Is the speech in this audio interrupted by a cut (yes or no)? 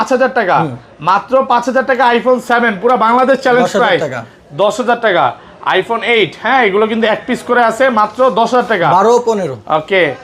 no